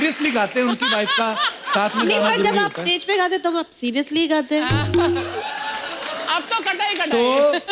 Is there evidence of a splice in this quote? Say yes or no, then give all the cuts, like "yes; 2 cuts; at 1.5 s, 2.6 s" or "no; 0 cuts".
no; 0 cuts